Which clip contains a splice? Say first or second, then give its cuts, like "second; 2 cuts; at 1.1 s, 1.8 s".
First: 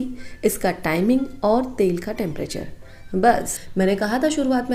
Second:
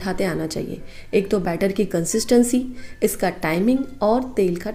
first; 1 cut; at 3.6 s